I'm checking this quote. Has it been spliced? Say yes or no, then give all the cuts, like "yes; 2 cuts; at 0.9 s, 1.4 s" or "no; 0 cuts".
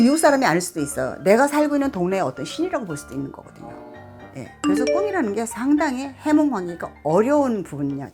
no; 0 cuts